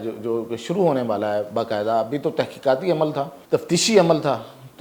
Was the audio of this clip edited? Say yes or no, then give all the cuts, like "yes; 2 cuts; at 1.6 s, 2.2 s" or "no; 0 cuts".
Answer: yes; 1 cut; at 3.4 s